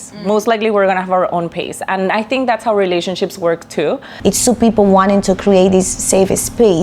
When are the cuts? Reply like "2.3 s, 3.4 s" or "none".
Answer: 4.1 s